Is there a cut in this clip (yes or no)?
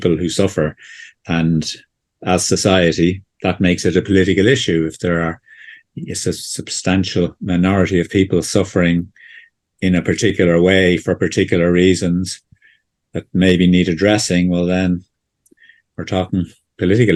no